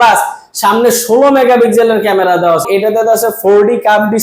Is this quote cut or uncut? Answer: cut